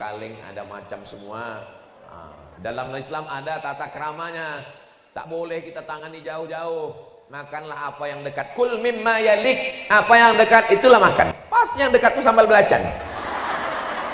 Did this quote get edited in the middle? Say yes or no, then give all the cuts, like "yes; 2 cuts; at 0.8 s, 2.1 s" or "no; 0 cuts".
no; 0 cuts